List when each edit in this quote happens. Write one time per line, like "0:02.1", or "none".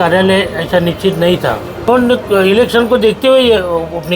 0:01.9